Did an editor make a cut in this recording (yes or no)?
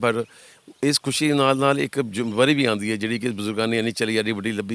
no